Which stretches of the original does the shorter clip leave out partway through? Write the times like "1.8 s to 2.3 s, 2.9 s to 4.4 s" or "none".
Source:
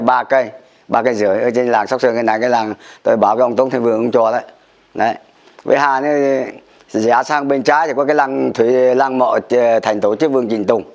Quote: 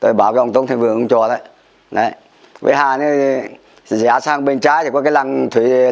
none